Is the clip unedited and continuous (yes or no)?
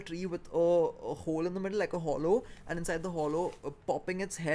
yes